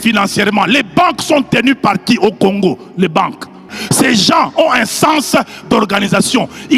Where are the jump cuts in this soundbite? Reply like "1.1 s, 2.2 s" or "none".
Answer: 3.8 s